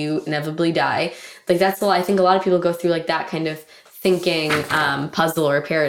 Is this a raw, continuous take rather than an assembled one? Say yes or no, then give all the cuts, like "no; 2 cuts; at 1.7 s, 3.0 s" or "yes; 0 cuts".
yes; 0 cuts